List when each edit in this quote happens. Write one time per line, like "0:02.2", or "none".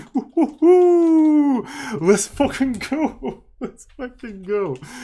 none